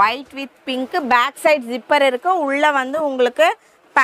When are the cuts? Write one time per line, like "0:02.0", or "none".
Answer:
none